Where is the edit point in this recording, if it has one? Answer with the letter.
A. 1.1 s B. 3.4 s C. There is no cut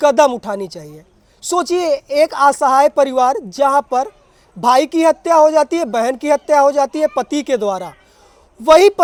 C